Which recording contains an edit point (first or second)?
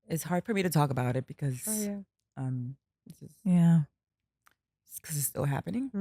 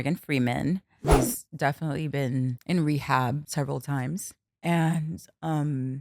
second